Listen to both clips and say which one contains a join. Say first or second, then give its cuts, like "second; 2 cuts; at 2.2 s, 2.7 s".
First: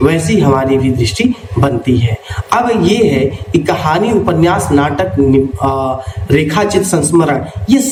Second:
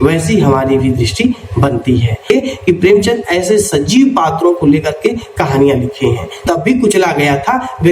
second; 2 cuts; at 2.3 s, 6.4 s